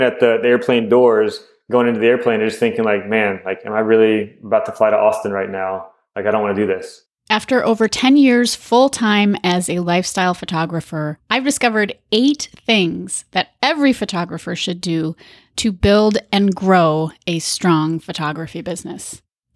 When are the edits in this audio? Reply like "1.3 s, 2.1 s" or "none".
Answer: 6.9 s